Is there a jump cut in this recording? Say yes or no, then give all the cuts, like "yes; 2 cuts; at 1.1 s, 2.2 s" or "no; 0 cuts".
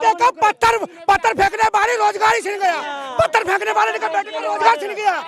no; 0 cuts